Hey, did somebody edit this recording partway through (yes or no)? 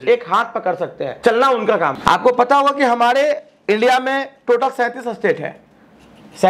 yes